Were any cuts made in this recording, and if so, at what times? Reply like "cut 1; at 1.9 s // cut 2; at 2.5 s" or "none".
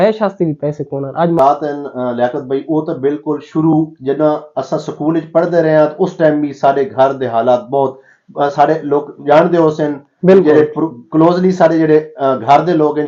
cut 1; at 1.4 s